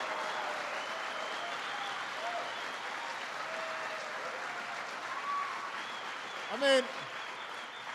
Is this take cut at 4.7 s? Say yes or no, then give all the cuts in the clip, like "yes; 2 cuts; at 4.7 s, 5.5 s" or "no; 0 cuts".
no; 1 cut; at 6.1 s